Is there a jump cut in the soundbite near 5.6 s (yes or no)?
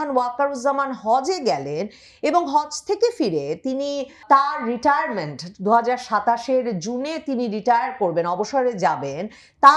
no